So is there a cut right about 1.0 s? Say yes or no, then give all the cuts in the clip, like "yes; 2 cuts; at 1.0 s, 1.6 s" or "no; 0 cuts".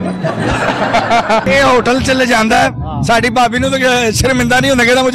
no; 0 cuts